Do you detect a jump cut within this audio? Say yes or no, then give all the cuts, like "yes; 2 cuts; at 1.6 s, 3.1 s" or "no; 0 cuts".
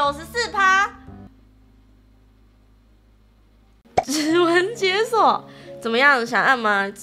yes; 1 cut; at 3.8 s